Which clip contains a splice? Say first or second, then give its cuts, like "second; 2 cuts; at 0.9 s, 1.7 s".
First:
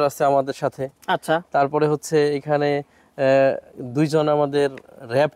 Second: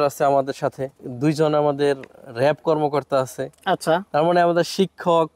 second; 1 cut; at 0.9 s